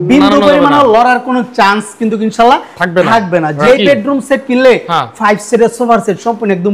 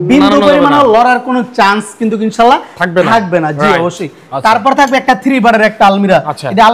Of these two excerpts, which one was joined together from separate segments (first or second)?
first